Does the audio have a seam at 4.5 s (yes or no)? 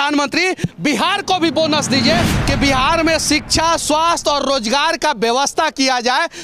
no